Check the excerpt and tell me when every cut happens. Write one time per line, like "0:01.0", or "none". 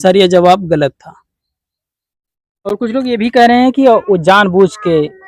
none

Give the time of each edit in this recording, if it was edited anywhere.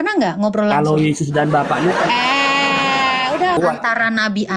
0:03.6

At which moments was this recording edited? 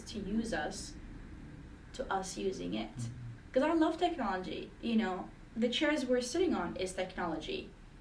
none

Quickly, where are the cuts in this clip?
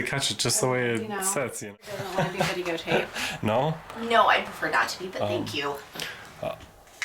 0:01.6

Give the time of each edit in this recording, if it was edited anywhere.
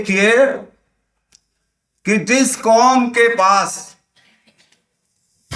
none

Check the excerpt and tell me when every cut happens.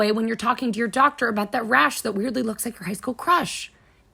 none

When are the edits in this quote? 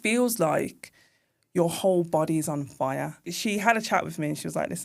0:03.1

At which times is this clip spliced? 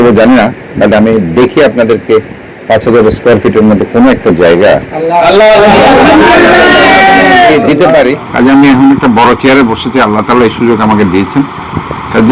0:08.2

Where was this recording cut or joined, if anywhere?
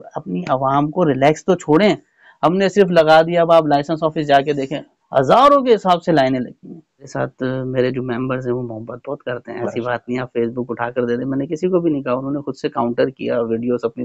0:07.1

